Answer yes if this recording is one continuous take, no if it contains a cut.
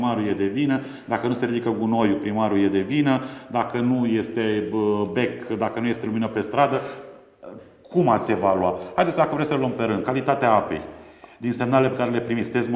yes